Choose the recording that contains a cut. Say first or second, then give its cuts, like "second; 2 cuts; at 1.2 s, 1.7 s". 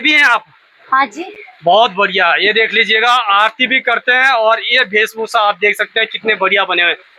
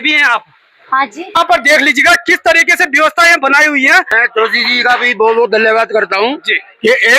second; 2 cuts; at 1.4 s, 4.1 s